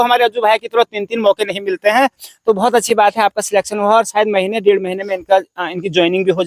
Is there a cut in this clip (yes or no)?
no